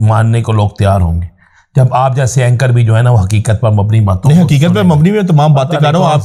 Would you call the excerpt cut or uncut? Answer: uncut